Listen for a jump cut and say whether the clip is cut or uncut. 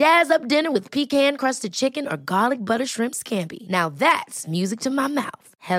uncut